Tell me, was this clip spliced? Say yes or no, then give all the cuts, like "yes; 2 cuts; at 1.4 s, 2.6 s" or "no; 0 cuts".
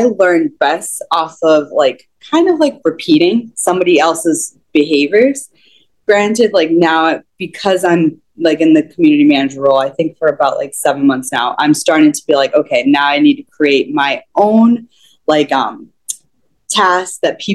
no; 0 cuts